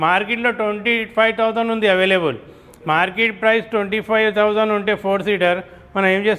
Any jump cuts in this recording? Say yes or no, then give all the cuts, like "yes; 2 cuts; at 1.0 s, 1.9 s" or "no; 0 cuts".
no; 0 cuts